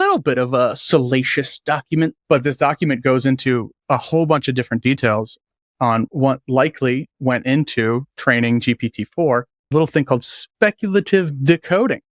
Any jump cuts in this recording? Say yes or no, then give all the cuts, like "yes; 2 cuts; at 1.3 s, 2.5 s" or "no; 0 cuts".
yes; 3 cuts; at 2.2 s, 6.1 s, 9.7 s